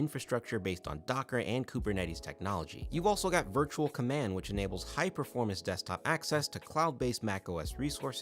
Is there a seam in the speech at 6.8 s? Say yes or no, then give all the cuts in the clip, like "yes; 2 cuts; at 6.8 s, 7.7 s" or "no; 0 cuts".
no; 1 cut; at 2.8 s